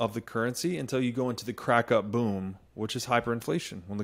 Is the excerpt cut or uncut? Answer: uncut